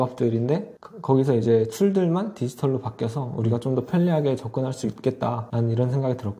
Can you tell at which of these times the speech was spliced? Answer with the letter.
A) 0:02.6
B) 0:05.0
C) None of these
C